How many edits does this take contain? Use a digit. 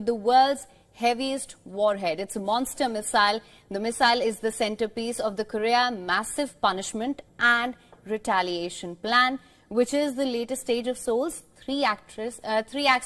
0